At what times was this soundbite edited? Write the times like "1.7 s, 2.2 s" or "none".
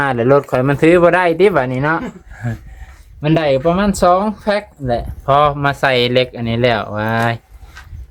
none